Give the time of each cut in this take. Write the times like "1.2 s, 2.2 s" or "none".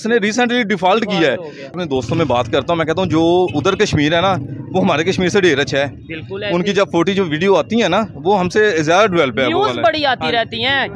1.8 s